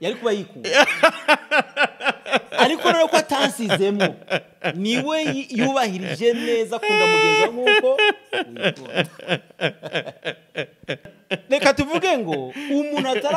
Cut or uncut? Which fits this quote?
cut